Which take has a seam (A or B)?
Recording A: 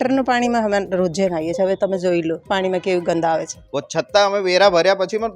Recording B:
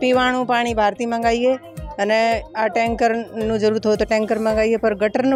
A